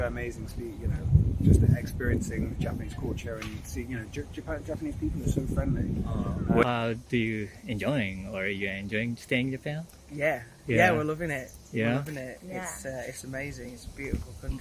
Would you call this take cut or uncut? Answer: cut